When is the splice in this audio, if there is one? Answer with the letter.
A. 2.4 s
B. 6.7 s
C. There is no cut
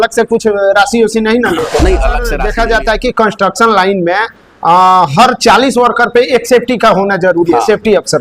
A